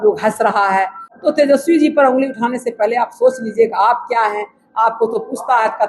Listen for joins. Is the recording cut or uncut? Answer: cut